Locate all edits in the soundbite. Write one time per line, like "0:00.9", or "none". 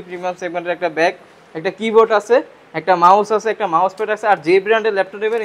none